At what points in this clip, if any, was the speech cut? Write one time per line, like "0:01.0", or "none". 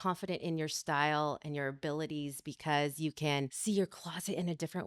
0:03.6